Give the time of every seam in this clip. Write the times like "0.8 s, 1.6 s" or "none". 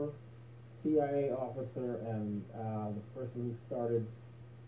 2.2 s